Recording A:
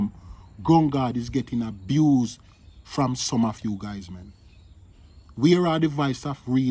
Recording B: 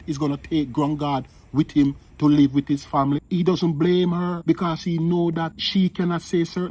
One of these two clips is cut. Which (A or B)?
B